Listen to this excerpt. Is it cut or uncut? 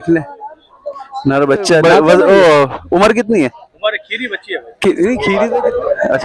cut